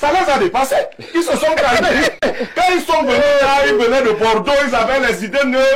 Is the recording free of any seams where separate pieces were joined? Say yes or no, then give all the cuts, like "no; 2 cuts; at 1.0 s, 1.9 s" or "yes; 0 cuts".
no; 1 cut; at 2.2 s